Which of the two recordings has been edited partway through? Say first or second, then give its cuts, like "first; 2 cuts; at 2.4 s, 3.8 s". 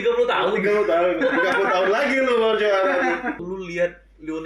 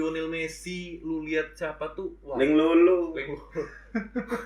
first; 1 cut; at 3.4 s